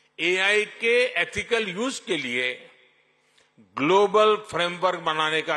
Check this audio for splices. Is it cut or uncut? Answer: uncut